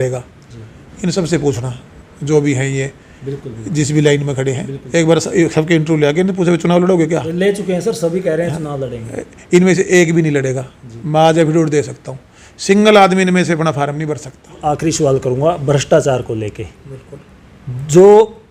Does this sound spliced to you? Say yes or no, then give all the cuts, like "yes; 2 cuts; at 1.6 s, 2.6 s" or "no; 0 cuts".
yes; 1 cut; at 14.6 s